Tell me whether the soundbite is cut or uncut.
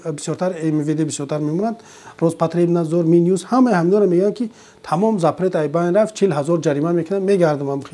uncut